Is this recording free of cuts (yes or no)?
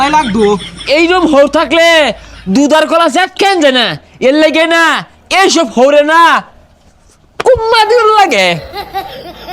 no